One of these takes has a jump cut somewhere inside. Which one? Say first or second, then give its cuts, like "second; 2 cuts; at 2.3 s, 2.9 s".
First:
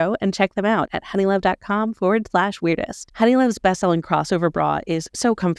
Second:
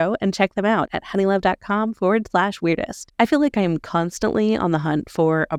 first; 1 cut; at 3.0 s